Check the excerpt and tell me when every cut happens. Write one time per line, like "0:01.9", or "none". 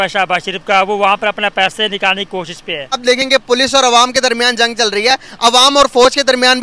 0:03.0